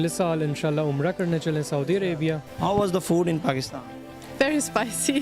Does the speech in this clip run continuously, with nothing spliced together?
no; 1 cut; at 2.5 s

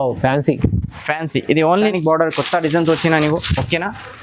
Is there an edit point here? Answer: yes; 1 cut; at 1.9 s

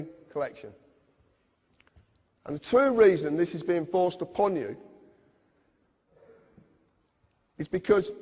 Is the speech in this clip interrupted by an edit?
no; 0 cuts

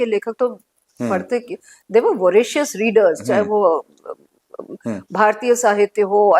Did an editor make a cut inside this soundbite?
no; 0 cuts

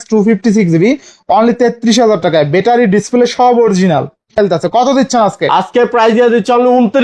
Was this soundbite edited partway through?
yes; 1 cut; at 4.4 s

